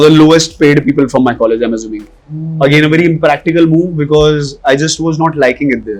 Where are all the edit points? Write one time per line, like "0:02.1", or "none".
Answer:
none